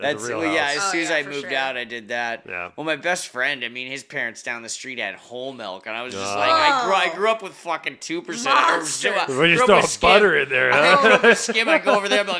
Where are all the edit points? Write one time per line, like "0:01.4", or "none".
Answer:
none